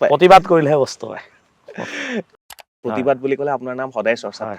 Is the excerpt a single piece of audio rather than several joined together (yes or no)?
no